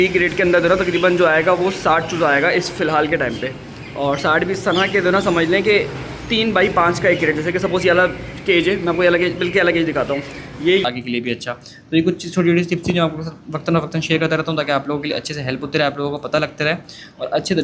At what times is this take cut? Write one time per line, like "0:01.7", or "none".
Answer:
0:10.9